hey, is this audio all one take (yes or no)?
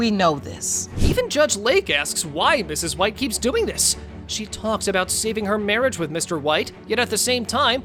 yes